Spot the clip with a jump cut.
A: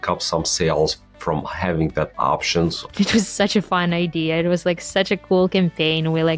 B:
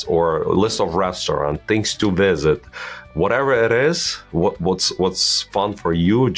A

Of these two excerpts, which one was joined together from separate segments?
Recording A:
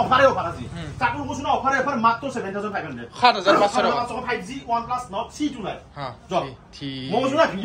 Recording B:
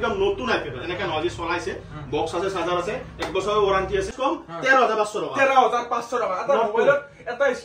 B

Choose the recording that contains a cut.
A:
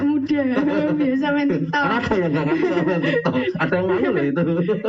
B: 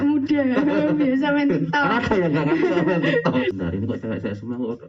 B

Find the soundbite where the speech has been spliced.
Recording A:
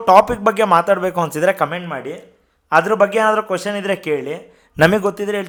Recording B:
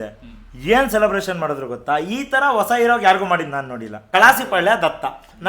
B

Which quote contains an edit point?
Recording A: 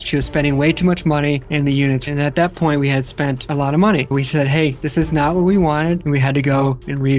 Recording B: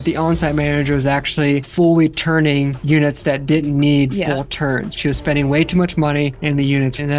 A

